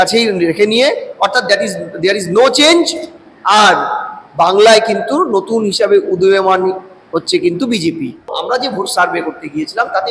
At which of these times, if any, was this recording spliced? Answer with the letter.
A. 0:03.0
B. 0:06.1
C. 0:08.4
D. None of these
C